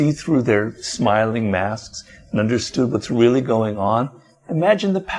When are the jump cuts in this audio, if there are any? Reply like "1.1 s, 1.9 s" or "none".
none